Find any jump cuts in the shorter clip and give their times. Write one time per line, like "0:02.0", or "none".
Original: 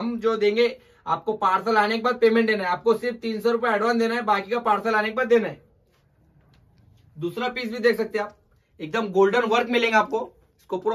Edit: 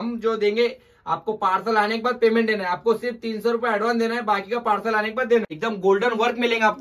0:05.5

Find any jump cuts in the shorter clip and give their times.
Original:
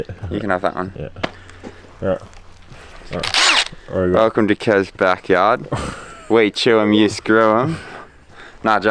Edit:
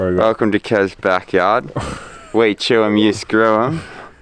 none

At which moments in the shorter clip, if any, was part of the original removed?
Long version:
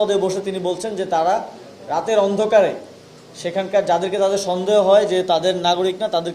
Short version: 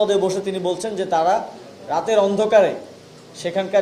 none

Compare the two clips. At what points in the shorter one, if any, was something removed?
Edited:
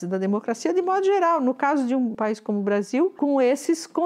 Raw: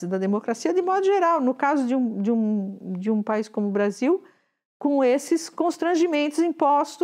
0:02.2
0:03.1

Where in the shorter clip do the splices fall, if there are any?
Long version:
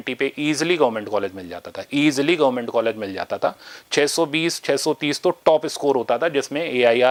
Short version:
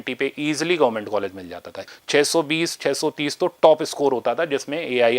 0:01.8

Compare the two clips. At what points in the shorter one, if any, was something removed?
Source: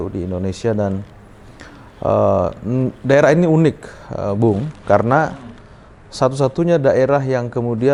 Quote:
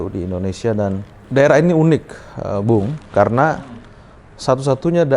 0:01.2

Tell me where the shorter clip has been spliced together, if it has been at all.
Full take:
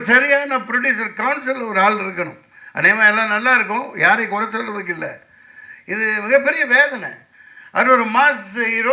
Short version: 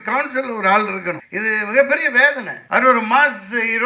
0:01.3
0:02.5

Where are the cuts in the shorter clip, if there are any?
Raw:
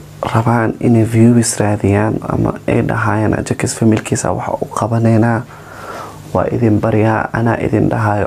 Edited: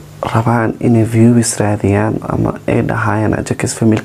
none

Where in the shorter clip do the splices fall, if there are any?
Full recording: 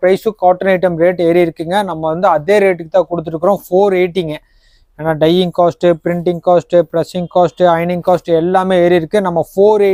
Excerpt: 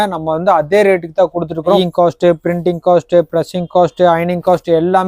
0:01.8

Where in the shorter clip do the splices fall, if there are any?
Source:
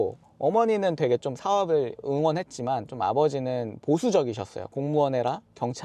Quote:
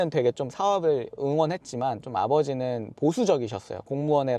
none

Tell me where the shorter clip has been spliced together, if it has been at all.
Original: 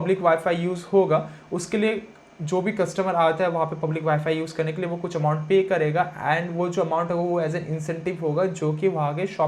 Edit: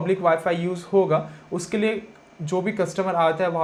none

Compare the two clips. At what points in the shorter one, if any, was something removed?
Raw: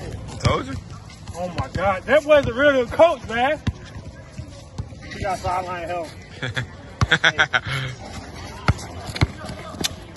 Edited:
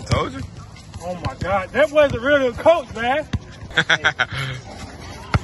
0:03.7

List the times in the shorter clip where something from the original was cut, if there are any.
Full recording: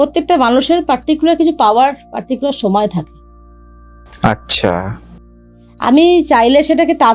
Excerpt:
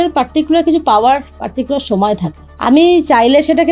0:02.4

